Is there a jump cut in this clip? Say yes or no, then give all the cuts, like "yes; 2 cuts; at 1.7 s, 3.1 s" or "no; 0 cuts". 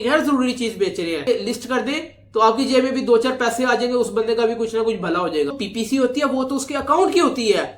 yes; 2 cuts; at 1.2 s, 5.6 s